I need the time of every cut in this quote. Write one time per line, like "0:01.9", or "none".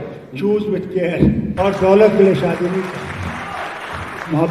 0:01.5

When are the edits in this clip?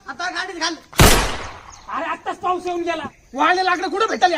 none

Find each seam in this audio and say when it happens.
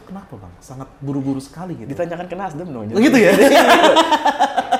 none

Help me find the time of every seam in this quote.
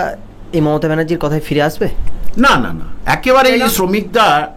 0:03.6

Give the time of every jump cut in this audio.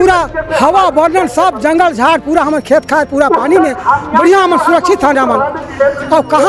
none

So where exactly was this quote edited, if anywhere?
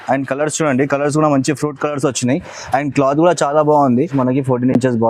0:04.1

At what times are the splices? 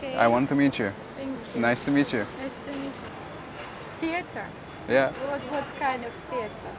0:03.1

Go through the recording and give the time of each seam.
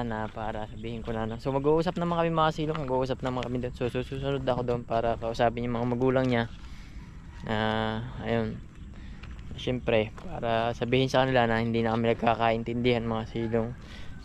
none

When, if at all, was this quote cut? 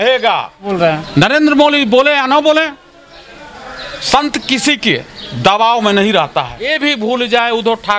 0:01.1
0:06.7

